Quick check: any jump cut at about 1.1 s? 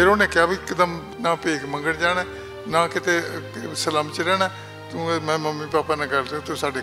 yes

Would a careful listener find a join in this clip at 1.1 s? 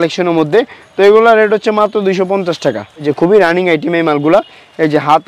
no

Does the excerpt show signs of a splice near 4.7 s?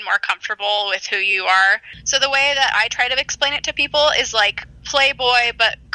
no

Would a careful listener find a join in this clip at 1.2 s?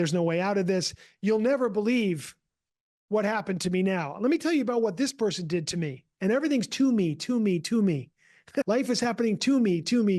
no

